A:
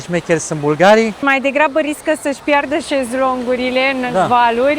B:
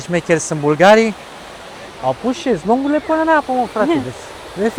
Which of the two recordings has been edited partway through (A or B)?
A